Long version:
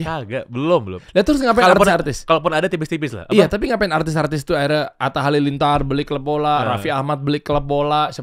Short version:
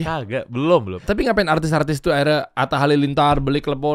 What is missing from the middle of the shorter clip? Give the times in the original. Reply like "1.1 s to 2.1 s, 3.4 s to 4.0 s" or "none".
1.1 s to 3.5 s